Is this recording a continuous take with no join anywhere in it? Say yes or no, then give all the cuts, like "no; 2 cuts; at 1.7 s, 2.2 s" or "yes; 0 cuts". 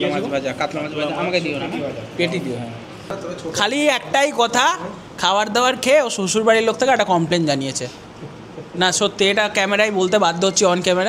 no; 1 cut; at 3.2 s